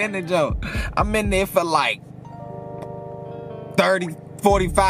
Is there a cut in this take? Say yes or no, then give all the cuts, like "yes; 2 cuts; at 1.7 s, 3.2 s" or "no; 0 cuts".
no; 0 cuts